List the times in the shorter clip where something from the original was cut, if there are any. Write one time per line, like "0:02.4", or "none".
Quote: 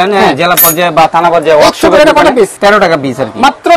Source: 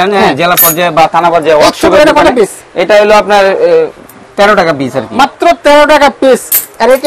0:02.5

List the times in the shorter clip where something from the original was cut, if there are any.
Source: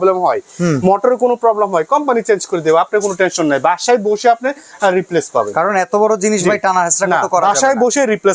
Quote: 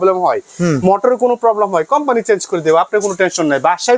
none

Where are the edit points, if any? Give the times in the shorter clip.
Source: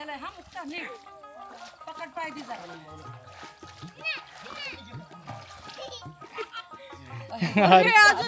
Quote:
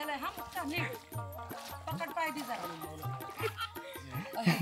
0:03.3

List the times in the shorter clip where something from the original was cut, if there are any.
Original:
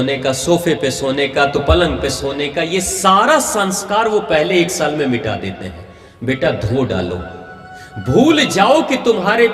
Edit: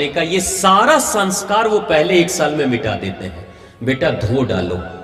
none

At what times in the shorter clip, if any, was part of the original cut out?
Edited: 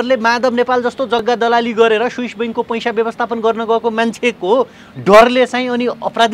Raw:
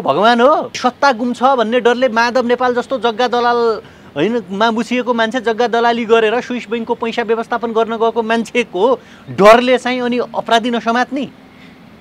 0:01.2

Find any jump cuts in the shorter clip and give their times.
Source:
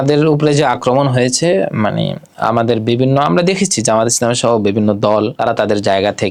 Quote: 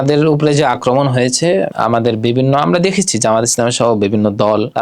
0:01.7

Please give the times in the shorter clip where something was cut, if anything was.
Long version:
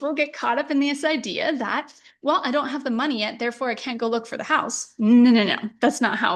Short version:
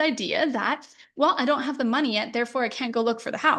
none

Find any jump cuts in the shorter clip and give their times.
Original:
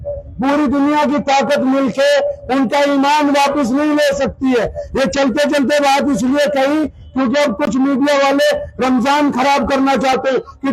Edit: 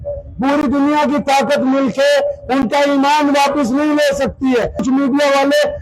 0:04.8

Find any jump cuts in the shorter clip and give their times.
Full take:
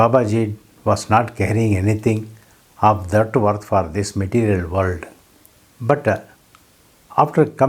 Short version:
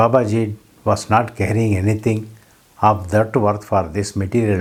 none

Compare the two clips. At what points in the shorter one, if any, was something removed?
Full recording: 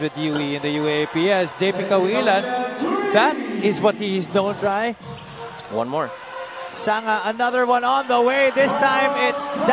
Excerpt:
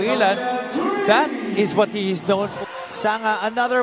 0:02.5

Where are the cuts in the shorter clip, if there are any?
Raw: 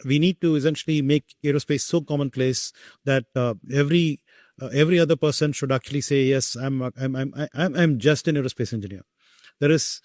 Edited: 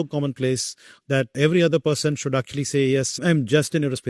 0:01.3
0:03.2

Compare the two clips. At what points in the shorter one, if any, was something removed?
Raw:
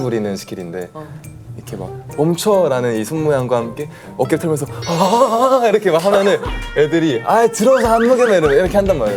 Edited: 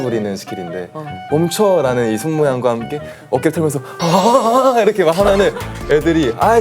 0:01.1

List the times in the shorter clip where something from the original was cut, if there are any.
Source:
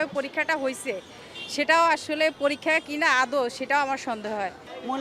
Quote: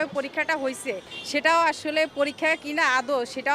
0:01.1

